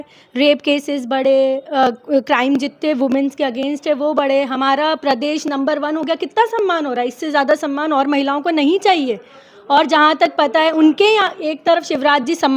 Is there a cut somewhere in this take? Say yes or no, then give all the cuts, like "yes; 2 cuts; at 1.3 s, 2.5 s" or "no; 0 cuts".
no; 0 cuts